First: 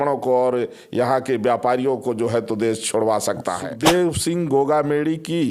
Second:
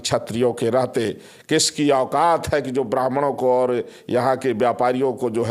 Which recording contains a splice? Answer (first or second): first